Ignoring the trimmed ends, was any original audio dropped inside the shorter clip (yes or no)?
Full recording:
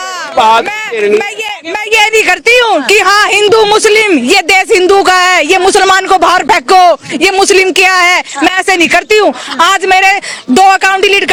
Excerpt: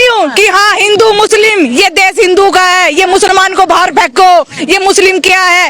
no